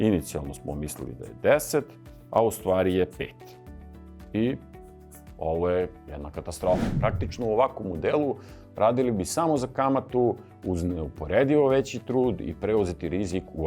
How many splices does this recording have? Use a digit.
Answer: 1